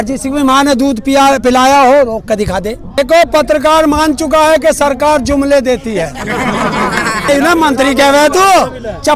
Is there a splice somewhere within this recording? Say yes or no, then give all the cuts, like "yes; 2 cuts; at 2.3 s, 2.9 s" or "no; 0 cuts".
yes; 2 cuts; at 2.8 s, 7.3 s